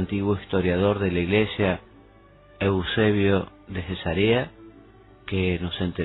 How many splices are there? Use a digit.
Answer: 1